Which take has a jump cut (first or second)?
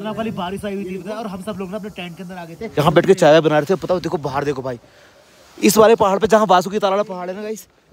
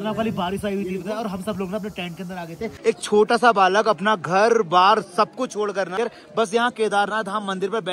second